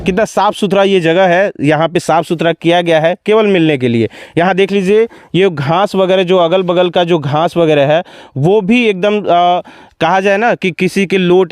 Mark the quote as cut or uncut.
uncut